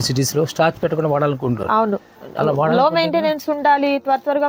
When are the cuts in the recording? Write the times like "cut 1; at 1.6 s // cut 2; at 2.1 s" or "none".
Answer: none

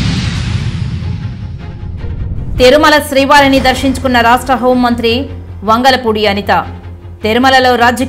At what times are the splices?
cut 1; at 2.5 s

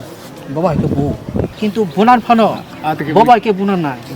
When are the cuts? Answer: cut 1; at 1.6 s

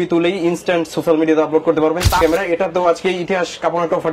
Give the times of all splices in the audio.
cut 1; at 2.2 s

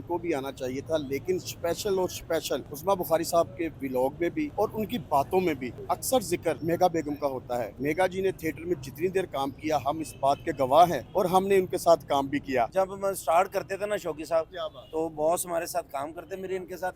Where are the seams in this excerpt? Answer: cut 1; at 4.5 s // cut 2; at 5.7 s // cut 3; at 6.6 s // cut 4; at 7.7 s // cut 5; at 11.0 s // cut 6; at 12.7 s

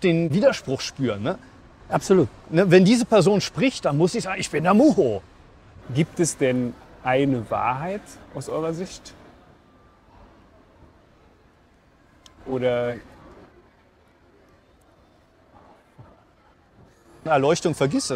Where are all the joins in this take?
cut 1; at 5.7 s // cut 2; at 17.3 s

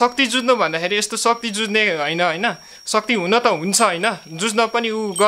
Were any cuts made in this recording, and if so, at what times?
none

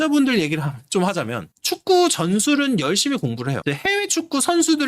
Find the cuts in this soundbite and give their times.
cut 1; at 3.6 s

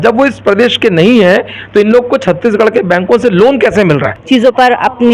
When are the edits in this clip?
cut 1; at 4.1 s

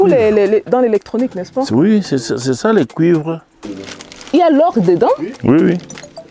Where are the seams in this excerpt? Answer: cut 1; at 3.8 s

